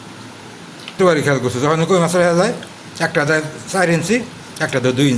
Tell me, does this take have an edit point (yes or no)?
yes